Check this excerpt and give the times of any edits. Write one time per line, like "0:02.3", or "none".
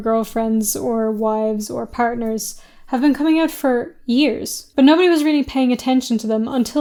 none